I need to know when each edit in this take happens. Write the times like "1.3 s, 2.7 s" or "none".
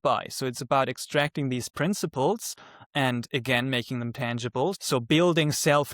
4.8 s